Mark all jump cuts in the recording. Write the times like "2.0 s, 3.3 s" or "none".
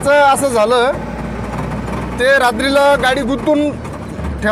none